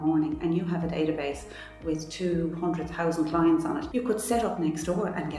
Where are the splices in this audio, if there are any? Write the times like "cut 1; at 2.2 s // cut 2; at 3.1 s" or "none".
cut 1; at 3.8 s